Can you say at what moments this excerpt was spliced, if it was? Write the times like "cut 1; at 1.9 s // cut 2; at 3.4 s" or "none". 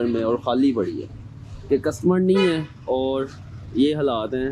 none

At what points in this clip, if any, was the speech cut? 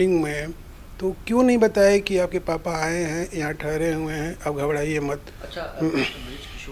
none

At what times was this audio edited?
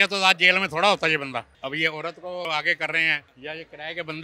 cut 1; at 1.5 s // cut 2; at 2.5 s // cut 3; at 3.3 s

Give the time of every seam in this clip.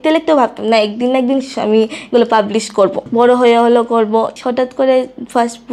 cut 1; at 3.0 s // cut 2; at 4.3 s

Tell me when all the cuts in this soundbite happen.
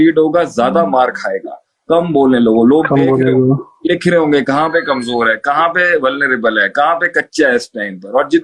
none

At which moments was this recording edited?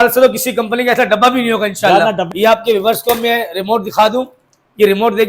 cut 1; at 2.3 s

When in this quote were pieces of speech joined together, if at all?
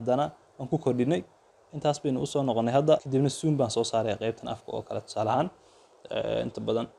cut 1; at 3.1 s

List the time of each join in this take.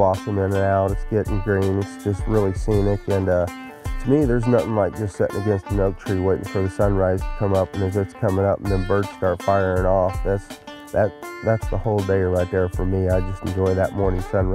none

